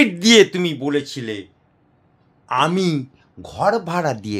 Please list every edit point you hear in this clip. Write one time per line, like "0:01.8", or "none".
none